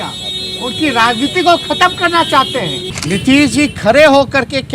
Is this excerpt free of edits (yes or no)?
no